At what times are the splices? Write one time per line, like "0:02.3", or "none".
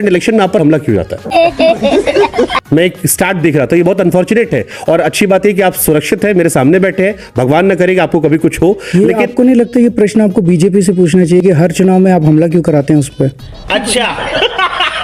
none